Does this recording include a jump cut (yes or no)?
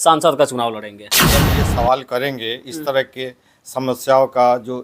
yes